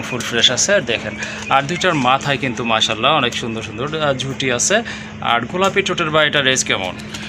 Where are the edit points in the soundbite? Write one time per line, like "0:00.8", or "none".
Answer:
none